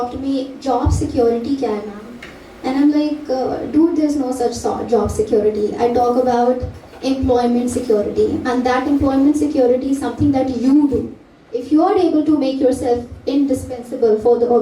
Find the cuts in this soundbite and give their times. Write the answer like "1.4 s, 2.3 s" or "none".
none